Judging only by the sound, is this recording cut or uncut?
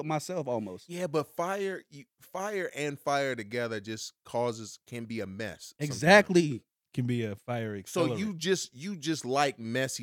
uncut